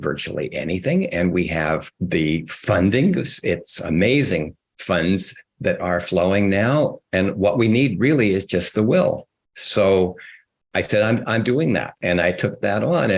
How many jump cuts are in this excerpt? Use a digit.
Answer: 3